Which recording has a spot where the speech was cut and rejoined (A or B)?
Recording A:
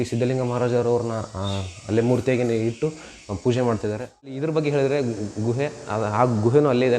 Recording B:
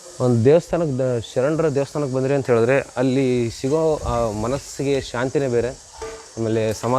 A